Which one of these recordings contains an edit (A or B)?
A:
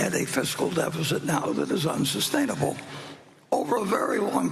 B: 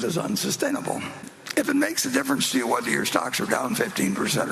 B